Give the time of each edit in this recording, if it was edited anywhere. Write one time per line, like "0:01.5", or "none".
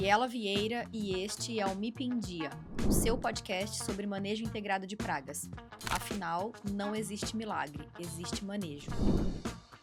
none